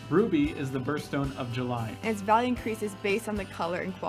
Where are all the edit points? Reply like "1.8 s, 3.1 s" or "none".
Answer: 1.9 s